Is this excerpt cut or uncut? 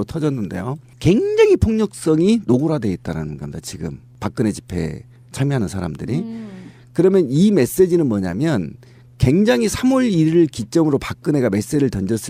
uncut